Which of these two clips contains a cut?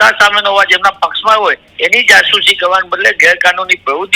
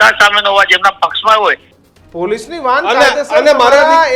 second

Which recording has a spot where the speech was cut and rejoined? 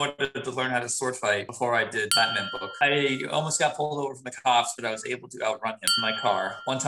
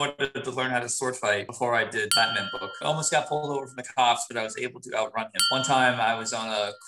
second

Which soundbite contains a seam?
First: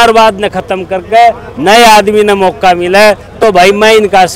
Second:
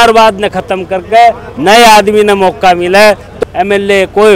second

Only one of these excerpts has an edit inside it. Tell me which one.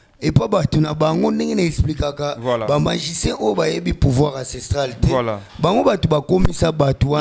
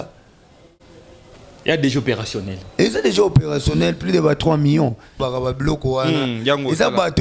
second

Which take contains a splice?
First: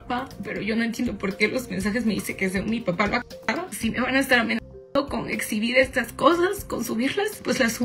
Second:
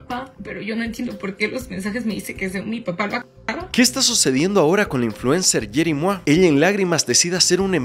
first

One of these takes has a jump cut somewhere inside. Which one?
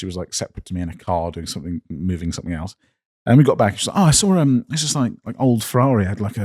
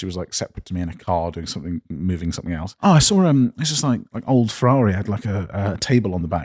second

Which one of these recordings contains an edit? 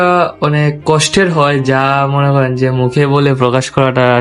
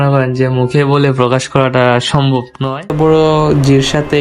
second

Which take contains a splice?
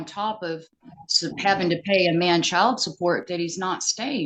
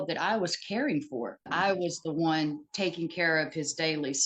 second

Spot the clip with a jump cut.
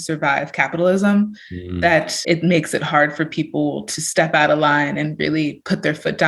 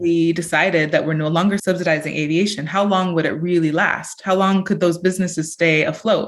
first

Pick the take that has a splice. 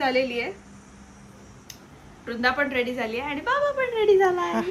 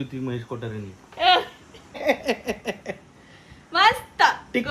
second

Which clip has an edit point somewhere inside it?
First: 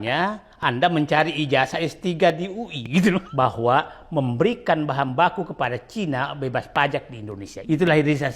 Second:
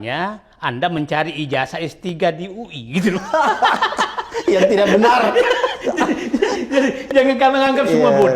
first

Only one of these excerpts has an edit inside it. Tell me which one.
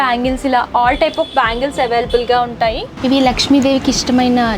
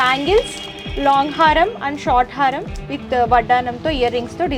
first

